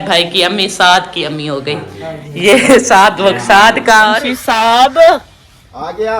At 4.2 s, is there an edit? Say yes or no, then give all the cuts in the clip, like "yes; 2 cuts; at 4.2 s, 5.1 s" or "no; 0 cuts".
yes; 1 cut; at 4.2 s